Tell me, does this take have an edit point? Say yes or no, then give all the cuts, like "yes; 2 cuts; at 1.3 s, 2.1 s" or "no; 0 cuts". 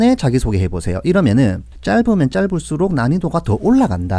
yes; 1 cut; at 1.7 s